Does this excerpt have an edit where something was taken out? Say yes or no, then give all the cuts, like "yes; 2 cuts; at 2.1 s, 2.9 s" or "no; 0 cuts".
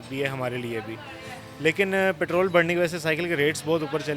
no; 0 cuts